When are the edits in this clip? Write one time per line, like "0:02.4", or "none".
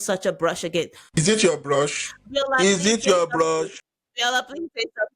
0:01.2